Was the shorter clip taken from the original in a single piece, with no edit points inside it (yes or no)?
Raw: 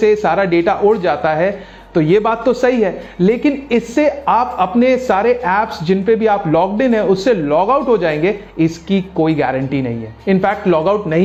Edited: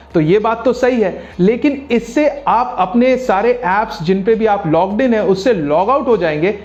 yes